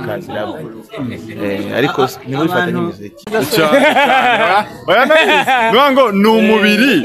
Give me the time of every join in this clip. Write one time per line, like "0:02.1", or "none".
0:03.3